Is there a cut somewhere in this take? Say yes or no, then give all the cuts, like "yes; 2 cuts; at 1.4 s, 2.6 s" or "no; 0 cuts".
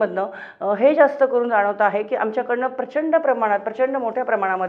no; 0 cuts